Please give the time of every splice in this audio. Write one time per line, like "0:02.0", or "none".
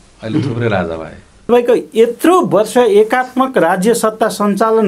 0:01.5

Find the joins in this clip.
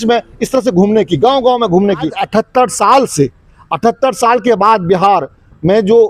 0:02.2

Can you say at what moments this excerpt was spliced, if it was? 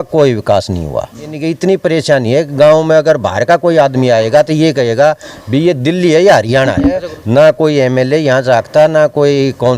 0:01.4
0:07.1

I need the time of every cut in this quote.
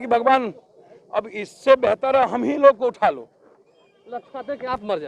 none

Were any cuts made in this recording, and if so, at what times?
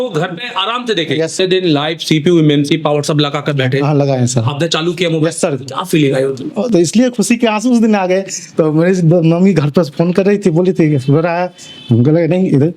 0:01.3

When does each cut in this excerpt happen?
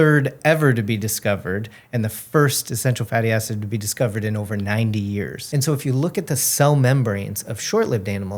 0:05.4

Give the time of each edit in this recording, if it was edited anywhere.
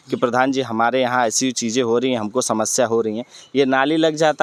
none

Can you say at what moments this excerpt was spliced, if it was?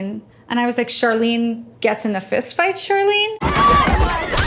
none

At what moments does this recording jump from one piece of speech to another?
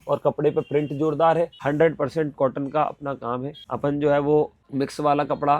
0:01.6
0:03.6
0:04.6

